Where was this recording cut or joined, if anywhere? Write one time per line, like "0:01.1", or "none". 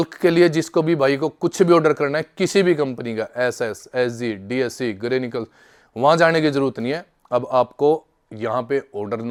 none